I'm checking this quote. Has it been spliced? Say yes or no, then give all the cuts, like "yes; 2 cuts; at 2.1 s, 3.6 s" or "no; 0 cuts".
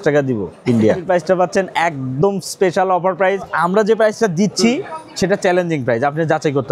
yes; 2 cuts; at 1.0 s, 3.5 s